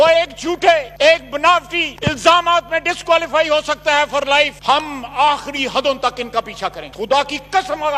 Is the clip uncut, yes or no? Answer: yes